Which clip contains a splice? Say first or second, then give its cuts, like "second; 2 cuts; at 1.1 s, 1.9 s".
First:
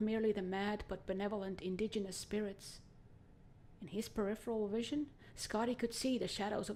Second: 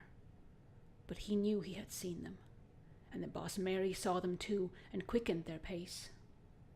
second; 1 cut; at 1.8 s